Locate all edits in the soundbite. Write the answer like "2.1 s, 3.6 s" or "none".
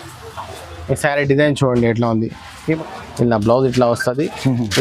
2.8 s